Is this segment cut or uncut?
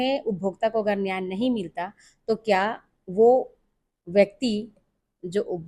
uncut